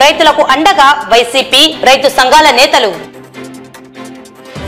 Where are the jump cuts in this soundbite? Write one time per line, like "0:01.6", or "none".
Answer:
none